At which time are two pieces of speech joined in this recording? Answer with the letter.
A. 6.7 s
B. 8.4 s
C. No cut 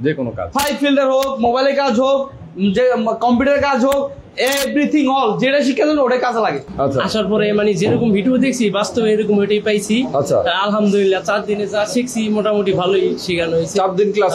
A